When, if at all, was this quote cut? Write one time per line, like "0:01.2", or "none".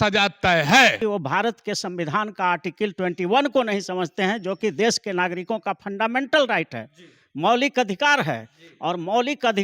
0:01.0